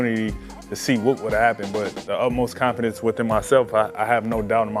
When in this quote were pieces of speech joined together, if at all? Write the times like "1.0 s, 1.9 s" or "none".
none